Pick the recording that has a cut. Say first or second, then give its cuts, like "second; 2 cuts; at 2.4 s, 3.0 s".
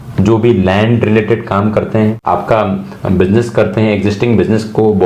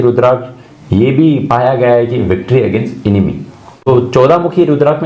second; 1 cut; at 3.9 s